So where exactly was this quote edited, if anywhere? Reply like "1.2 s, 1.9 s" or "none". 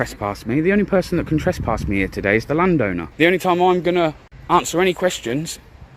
3.1 s, 4.3 s

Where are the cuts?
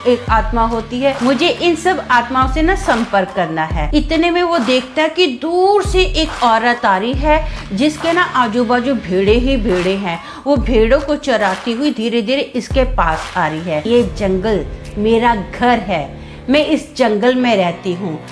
3.9 s, 13.9 s

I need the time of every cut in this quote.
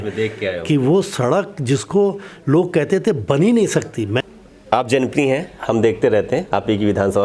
4.2 s

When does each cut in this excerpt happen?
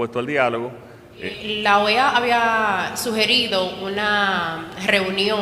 1.6 s

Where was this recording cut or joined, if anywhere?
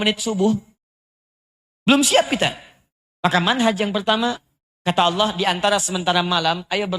4.4 s

